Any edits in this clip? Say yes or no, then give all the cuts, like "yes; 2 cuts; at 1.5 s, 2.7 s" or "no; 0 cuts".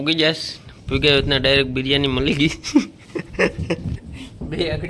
no; 0 cuts